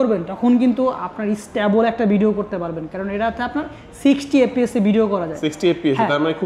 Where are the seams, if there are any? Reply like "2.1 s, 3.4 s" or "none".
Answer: none